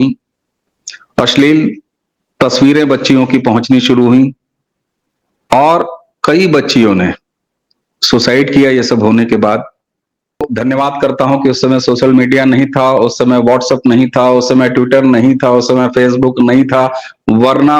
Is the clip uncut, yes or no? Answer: no